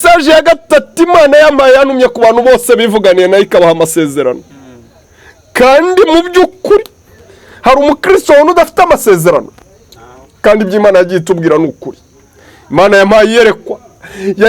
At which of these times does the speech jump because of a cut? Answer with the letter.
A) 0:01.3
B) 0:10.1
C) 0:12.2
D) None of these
D